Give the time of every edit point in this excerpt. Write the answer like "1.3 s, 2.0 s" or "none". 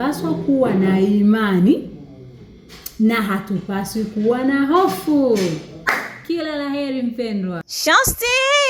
none